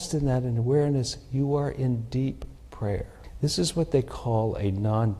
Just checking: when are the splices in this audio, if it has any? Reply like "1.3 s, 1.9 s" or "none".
3.2 s